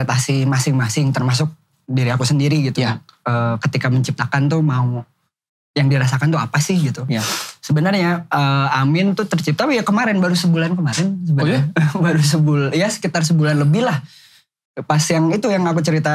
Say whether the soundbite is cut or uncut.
uncut